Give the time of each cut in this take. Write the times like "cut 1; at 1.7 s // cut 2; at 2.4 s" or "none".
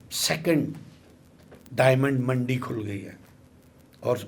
none